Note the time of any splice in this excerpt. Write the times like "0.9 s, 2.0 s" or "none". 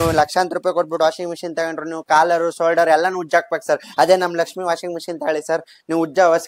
none